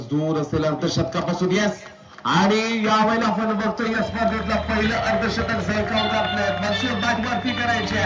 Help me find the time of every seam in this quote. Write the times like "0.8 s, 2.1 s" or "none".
none